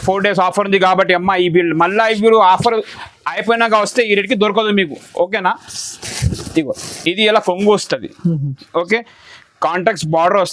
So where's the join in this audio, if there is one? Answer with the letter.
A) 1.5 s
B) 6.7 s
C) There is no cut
C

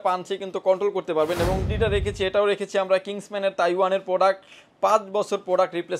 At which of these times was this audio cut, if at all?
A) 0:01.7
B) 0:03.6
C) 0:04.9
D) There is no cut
A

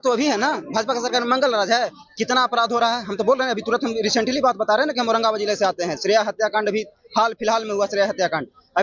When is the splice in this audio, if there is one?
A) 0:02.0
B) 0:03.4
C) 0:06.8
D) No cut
D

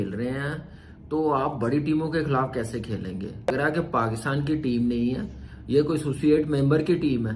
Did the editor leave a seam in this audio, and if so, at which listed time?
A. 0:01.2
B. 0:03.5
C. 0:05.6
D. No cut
B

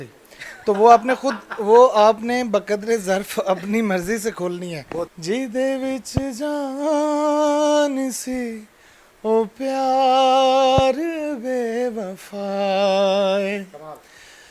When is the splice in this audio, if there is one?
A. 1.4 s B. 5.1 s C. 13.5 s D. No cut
B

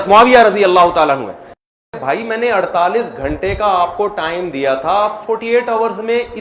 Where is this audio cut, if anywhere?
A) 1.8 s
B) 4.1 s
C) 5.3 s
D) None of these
A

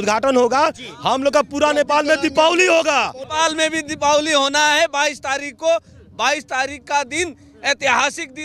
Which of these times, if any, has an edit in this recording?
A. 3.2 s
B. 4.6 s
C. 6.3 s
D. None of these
A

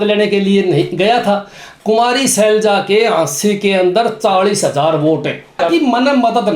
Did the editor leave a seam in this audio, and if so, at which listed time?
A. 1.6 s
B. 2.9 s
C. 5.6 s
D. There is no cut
C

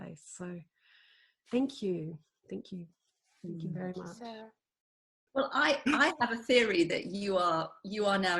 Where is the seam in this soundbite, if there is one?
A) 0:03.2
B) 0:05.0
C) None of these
B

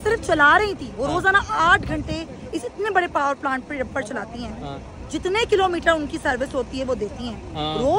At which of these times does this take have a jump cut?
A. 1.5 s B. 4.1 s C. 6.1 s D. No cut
D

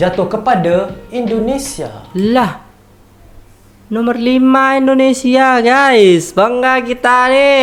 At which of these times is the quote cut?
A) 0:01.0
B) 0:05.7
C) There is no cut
C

